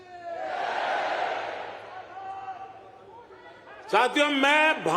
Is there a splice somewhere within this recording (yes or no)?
yes